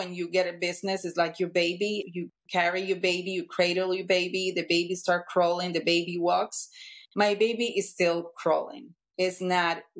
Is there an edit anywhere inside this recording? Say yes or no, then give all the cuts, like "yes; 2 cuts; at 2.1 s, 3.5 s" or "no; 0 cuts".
yes; 1 cut; at 2.0 s